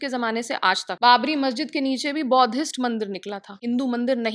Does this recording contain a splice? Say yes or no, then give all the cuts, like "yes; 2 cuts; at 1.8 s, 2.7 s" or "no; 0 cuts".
yes; 2 cuts; at 1.0 s, 3.6 s